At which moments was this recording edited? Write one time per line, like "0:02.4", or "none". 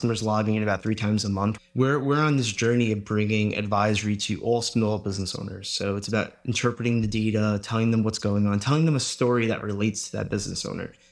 0:01.6